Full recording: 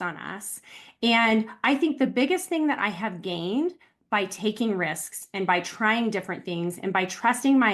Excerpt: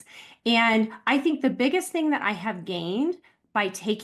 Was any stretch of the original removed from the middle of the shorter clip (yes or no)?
no